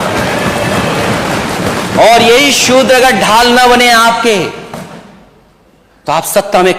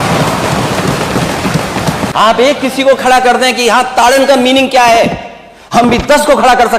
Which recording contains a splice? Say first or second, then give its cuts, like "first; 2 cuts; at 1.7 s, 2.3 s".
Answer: second; 1 cut; at 2.1 s